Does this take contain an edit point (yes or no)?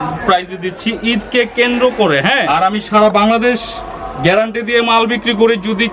yes